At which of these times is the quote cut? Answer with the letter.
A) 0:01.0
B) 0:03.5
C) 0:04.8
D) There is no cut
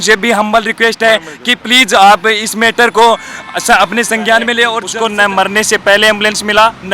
C